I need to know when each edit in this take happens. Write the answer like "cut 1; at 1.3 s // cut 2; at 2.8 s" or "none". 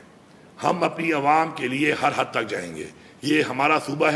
none